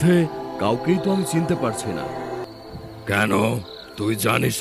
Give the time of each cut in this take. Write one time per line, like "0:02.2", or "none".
0:02.4